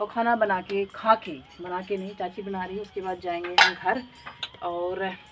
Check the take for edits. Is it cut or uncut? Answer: uncut